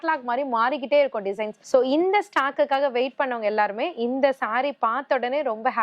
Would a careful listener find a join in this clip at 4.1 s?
no; 1 cut; at 1.5 s

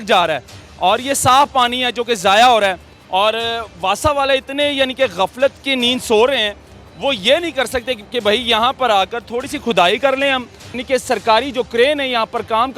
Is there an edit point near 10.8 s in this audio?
yes; 1 cut; at 10.8 s

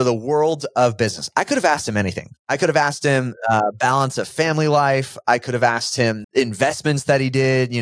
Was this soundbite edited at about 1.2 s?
no; 0 cuts

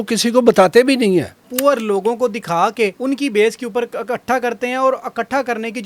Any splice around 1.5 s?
yes; 2 cuts; at 1.5 s, 3.0 s

